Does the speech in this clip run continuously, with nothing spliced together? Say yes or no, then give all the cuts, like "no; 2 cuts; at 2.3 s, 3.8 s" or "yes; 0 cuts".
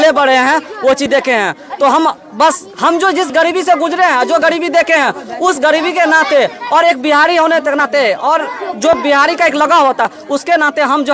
yes; 0 cuts